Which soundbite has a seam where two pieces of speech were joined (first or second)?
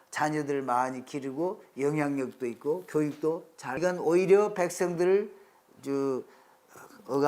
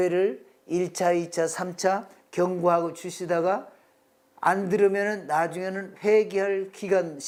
first